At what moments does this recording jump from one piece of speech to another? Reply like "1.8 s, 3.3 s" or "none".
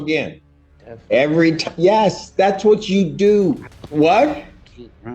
3.8 s